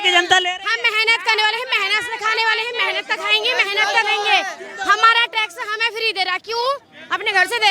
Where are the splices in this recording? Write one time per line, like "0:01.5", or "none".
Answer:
none